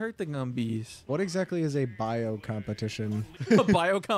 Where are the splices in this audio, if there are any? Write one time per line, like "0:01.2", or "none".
0:01.1
0:03.4